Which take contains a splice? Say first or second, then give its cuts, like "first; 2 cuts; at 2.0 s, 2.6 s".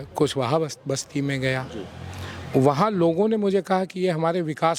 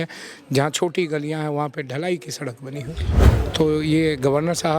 second; 1 cut; at 3.3 s